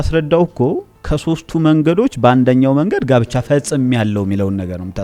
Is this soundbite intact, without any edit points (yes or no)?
yes